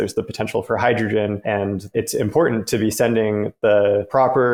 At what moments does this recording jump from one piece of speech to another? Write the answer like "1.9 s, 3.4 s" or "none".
none